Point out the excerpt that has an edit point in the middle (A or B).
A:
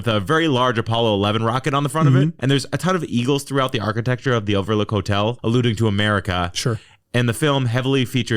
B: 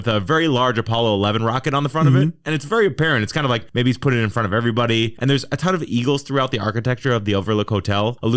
A